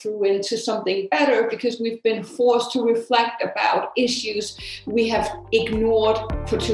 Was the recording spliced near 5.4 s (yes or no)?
yes